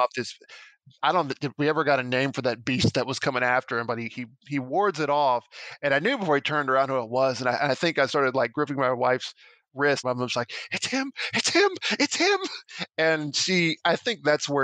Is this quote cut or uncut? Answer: cut